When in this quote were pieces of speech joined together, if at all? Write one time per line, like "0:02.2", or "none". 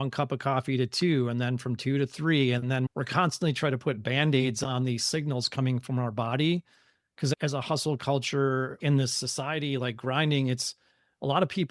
none